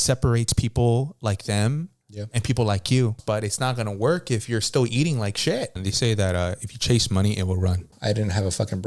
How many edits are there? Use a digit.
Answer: 3